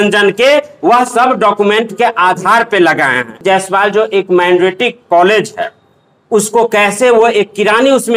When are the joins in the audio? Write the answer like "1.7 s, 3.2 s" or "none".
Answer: 3.4 s